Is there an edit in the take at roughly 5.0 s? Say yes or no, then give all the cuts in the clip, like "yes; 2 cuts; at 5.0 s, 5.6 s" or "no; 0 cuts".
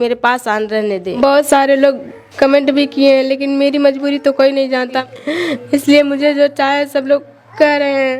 yes; 2 cuts; at 1.2 s, 5.0 s